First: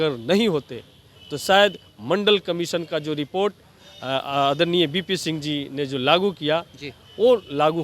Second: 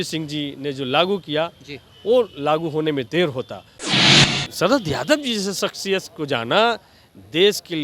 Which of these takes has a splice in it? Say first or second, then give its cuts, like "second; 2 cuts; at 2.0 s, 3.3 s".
second; 1 cut; at 4.1 s